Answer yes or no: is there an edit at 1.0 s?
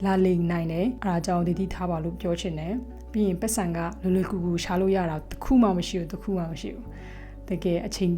yes